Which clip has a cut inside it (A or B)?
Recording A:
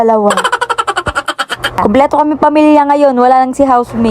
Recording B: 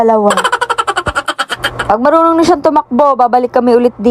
A